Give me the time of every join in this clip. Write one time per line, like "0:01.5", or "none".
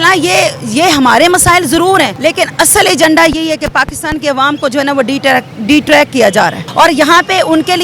0:02.1
0:06.6